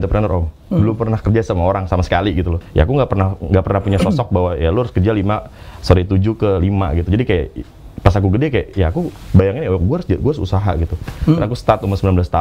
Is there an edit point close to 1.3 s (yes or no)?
no